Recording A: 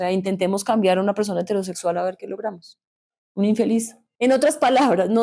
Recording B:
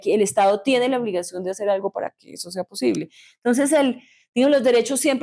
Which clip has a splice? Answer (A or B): A